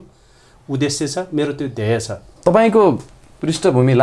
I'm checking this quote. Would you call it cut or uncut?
uncut